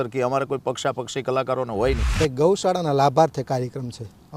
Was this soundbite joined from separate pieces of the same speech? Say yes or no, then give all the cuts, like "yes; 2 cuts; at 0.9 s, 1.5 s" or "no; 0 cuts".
yes; 1 cut; at 2.1 s